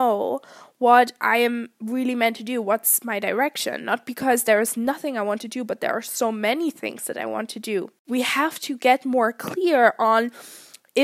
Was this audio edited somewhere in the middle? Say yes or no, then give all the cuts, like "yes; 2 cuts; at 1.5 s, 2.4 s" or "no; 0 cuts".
yes; 1 cut; at 8.0 s